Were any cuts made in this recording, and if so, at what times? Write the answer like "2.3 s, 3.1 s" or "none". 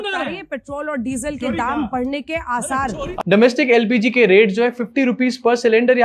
3.0 s